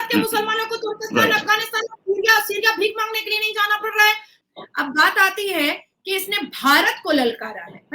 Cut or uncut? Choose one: cut